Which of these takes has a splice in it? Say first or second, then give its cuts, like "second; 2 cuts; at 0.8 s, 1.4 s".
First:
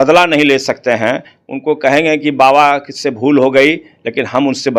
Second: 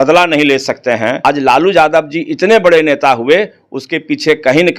second; 1 cut; at 1.2 s